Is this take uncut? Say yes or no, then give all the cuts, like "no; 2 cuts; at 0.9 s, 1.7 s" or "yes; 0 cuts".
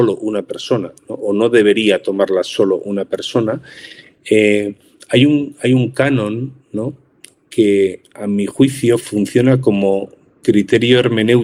yes; 0 cuts